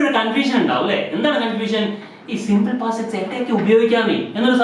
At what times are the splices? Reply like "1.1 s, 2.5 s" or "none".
none